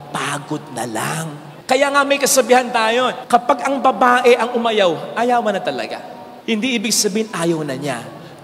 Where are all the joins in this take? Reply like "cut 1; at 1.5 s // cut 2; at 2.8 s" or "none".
none